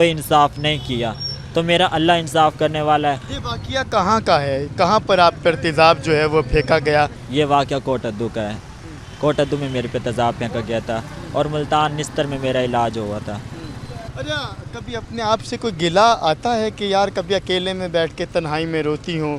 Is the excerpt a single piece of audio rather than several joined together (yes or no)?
yes